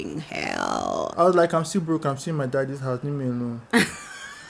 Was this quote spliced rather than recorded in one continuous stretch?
yes; 1 cut; at 1.0 s

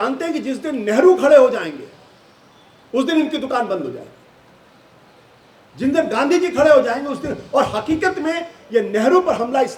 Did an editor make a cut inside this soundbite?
no; 0 cuts

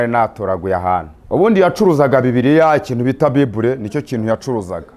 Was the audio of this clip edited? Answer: yes; 1 cut; at 1.1 s

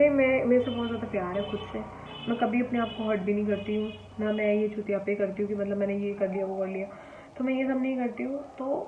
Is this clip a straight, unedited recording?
yes; 0 cuts

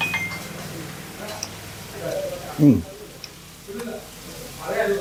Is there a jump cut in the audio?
no; 0 cuts

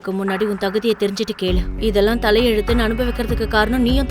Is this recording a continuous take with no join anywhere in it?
yes; 0 cuts

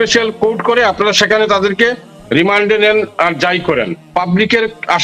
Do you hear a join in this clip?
no; 0 cuts

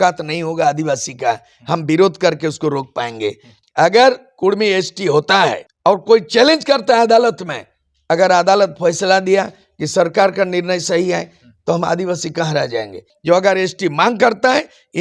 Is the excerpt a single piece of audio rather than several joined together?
no; 3 cuts; at 3.5 s, 5.7 s, 13.1 s

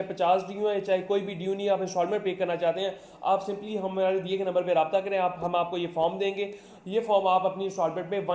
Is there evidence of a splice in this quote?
no; 0 cuts

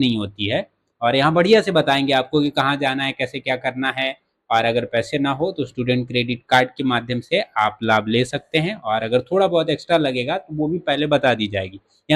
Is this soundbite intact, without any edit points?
yes; 0 cuts

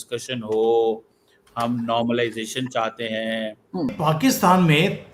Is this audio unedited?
no; 1 cut; at 3.9 s

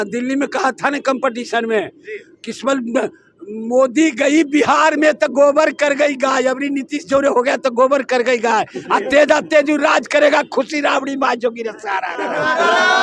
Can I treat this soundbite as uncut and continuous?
yes; 0 cuts

